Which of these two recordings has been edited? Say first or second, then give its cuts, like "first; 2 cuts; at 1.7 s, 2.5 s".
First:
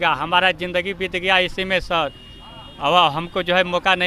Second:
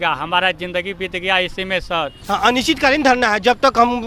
second; 1 cut; at 2.2 s